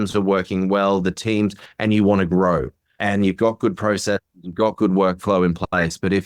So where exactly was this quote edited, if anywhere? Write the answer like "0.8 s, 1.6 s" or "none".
none

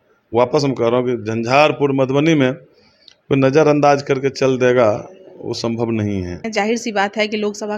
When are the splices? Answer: 6.4 s

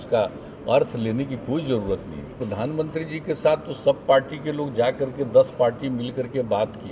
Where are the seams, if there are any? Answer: 2.4 s

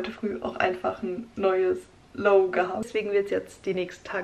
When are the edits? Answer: 2.9 s

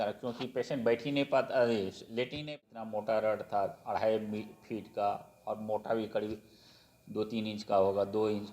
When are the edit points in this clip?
2.5 s

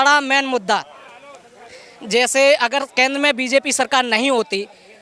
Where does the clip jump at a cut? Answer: none

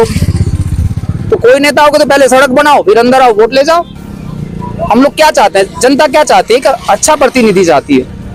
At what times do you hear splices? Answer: none

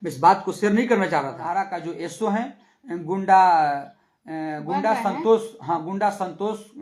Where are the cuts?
1.5 s

